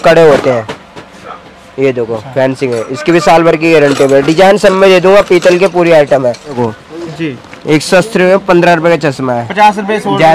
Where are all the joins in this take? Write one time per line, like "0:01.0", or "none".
0:06.6